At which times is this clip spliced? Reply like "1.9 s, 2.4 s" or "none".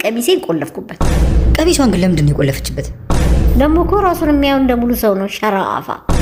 none